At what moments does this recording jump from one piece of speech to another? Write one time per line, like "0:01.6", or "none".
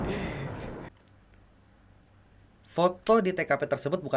0:00.9